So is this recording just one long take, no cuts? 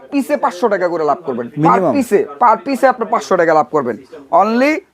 yes; 0 cuts

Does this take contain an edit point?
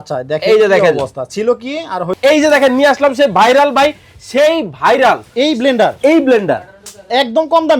yes; 1 cut; at 2.1 s

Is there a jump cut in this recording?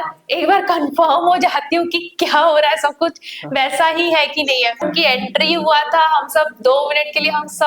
yes; 1 cut; at 4.8 s

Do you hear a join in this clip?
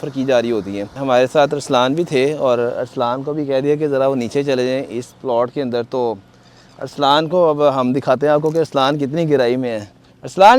yes; 1 cut; at 0.9 s

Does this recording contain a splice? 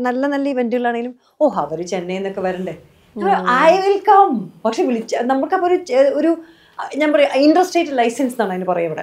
no; 0 cuts

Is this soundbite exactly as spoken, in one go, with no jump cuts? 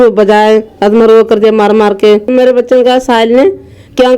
no; 1 cut; at 2.3 s

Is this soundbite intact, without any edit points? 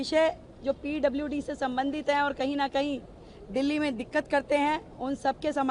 yes; 0 cuts

